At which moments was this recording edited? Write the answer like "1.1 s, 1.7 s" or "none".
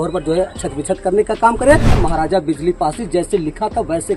1.9 s